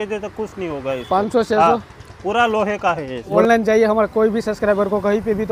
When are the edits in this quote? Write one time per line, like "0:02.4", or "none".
0:03.3